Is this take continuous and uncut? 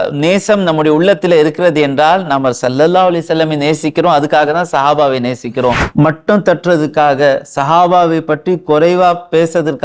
no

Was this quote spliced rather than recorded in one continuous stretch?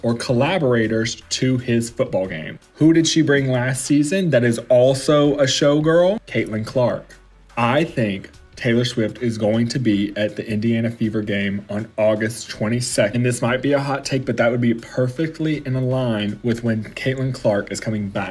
no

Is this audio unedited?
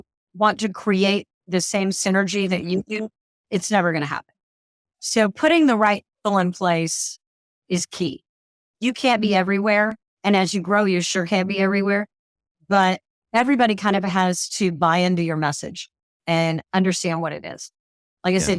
no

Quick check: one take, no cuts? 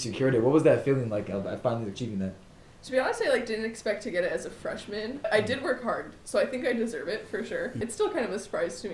no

